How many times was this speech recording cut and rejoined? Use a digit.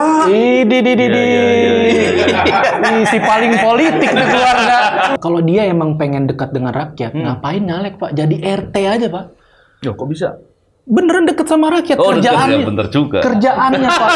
1